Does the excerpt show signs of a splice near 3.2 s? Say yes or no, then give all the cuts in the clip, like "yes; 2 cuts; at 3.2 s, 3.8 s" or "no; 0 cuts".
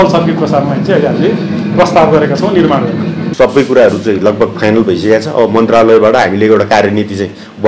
yes; 1 cut; at 3.2 s